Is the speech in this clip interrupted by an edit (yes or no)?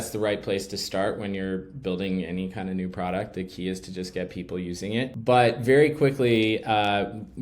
yes